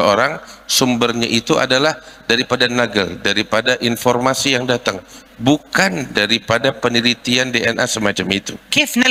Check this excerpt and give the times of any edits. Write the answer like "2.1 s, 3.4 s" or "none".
none